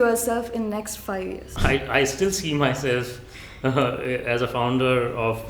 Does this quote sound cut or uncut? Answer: cut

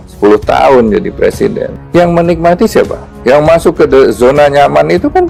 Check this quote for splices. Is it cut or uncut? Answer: uncut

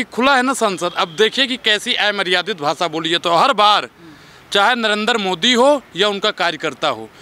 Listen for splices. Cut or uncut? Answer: uncut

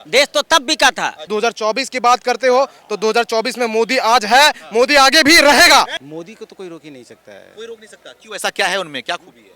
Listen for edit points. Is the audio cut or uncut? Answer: cut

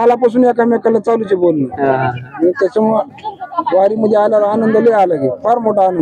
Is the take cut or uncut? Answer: uncut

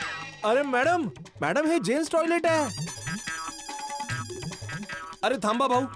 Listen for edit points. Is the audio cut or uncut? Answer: uncut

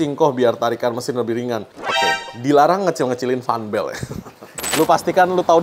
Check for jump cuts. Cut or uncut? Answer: cut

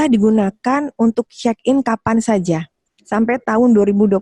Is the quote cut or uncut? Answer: uncut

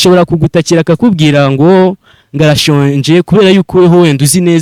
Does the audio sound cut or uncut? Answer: uncut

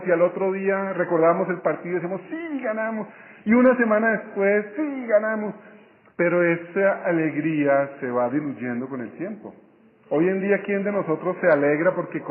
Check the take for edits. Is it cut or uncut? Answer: cut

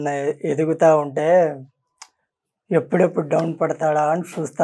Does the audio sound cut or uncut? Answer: uncut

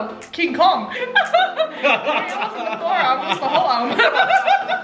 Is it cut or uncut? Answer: cut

